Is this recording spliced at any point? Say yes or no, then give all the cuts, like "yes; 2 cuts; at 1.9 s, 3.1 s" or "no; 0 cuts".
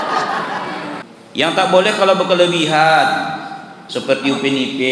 yes; 1 cut; at 1.0 s